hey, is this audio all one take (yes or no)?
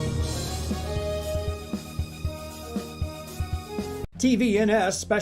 no